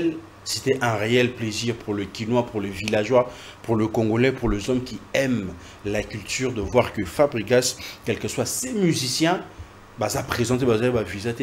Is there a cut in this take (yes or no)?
no